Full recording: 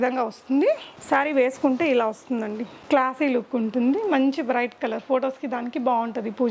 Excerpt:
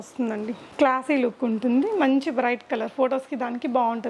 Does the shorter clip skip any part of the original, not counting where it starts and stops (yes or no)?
no